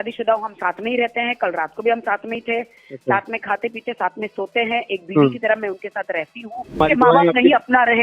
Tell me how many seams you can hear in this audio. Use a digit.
1